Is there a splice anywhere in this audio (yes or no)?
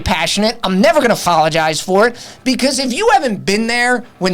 yes